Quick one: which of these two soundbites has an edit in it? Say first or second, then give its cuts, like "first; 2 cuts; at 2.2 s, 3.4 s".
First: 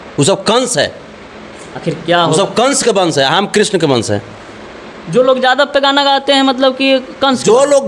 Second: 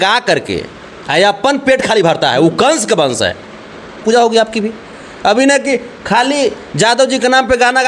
second; 1 cut; at 4.0 s